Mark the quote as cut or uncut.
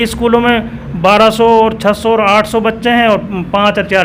uncut